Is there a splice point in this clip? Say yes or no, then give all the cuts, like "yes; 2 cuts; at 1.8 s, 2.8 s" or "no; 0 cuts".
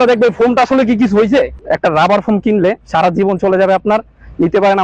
yes; 1 cut; at 1.6 s